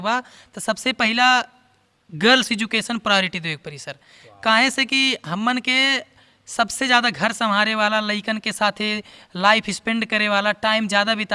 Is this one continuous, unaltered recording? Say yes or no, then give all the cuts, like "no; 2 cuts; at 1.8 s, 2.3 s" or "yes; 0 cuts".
yes; 0 cuts